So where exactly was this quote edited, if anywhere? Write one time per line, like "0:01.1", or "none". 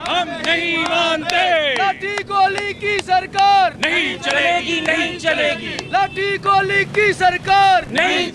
none